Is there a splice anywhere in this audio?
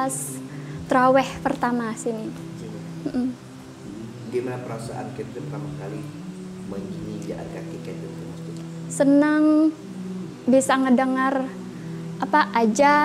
no; 0 cuts

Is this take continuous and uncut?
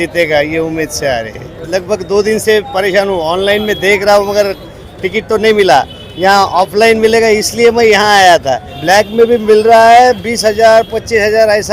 no; 2 cuts; at 1.6 s, 8.7 s

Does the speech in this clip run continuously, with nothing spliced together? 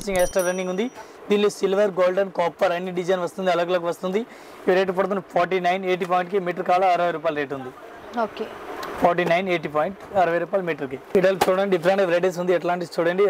yes; 0 cuts

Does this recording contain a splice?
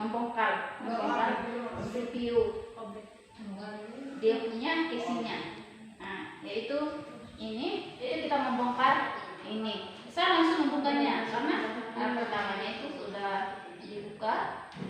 yes; 1 cut; at 8.1 s

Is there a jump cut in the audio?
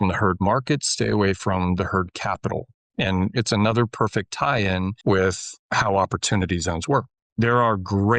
yes; 2 cuts; at 5.0 s, 7.1 s

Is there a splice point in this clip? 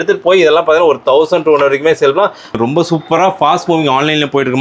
yes; 1 cut; at 2.5 s

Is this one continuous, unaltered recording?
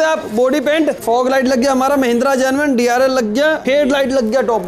no; 1 cut; at 1.0 s

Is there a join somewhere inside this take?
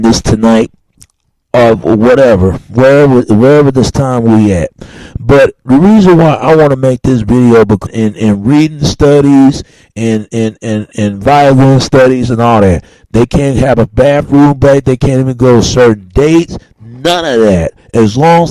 no; 0 cuts

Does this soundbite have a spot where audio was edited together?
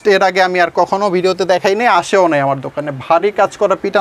no; 0 cuts

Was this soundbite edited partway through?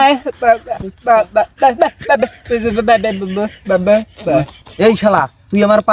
yes; 1 cut; at 4.7 s

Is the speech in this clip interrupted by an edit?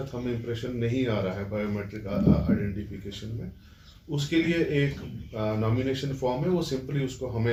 no; 0 cuts

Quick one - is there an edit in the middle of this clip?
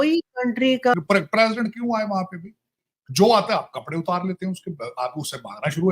yes; 1 cut; at 0.9 s

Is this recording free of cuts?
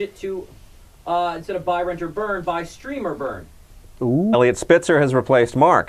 yes; 0 cuts

